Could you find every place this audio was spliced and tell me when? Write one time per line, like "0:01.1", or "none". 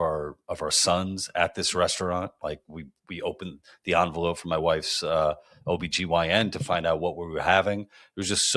none